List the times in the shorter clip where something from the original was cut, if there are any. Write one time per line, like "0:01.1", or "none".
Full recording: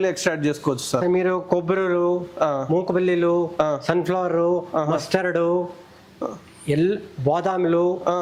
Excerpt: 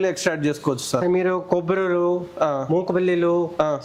none